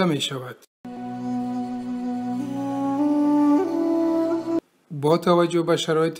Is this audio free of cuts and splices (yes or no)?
no